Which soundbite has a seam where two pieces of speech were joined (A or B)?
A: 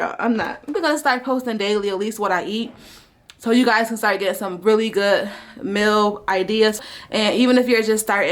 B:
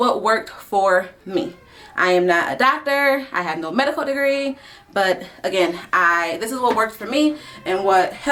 A